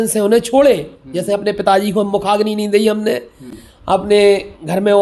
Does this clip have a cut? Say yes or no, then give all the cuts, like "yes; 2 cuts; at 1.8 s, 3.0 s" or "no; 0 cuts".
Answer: no; 0 cuts